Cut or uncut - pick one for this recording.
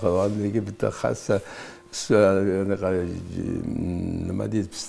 uncut